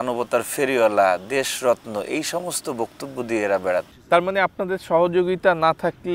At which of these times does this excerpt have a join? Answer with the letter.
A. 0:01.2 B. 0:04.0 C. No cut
B